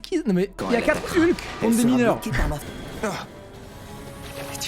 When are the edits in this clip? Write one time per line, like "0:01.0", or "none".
0:02.7